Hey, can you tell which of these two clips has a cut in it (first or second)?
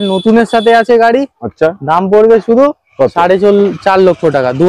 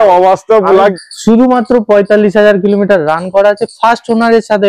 second